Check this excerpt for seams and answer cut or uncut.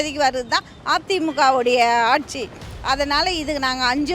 uncut